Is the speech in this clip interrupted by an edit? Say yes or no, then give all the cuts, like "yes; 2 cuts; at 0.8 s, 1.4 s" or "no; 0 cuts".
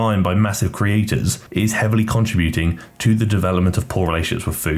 yes; 1 cut; at 1.4 s